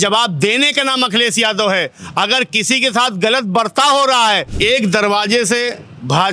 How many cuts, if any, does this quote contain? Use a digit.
1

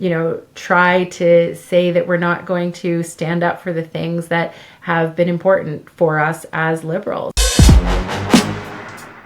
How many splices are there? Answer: 1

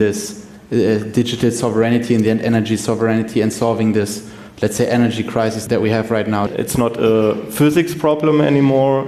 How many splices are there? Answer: 2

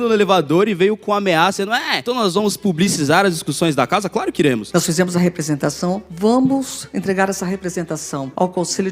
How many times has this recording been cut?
2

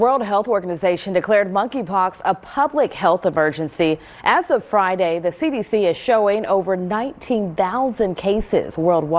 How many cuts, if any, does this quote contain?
0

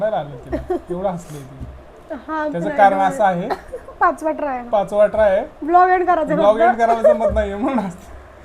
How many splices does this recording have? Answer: 0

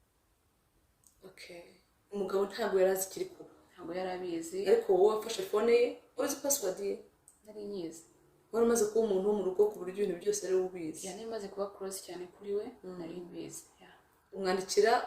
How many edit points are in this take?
0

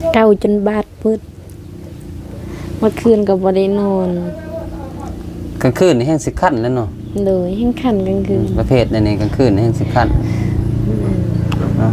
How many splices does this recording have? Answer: 0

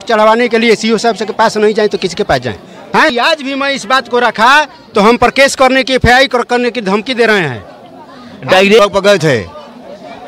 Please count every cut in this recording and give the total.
2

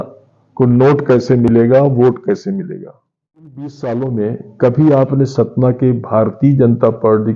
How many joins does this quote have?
1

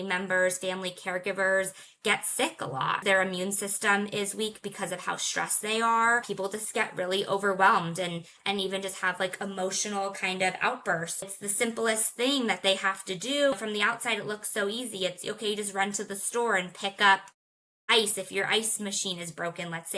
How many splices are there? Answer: 4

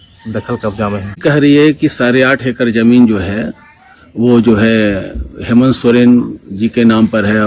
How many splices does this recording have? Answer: 1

